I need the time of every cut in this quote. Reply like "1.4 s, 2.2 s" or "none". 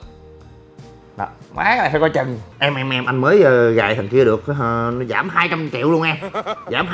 2.4 s